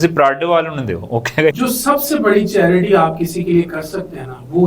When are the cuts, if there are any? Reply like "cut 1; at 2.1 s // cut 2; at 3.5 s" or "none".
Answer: cut 1; at 1.5 s